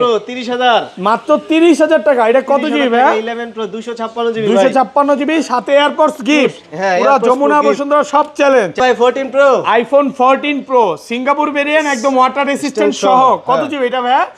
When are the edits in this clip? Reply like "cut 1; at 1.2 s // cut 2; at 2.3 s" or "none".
cut 1; at 8.8 s